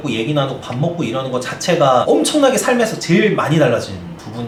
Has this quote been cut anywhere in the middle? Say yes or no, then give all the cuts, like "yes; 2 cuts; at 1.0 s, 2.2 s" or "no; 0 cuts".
no; 0 cuts